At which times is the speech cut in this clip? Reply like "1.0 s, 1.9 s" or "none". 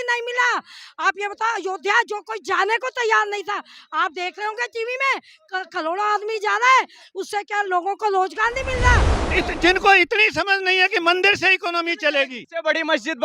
9.2 s, 12.4 s